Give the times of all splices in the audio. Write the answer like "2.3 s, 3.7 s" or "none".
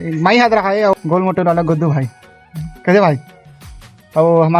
1.0 s, 2.7 s